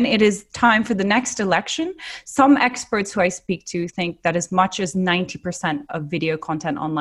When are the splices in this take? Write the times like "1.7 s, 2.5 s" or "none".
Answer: none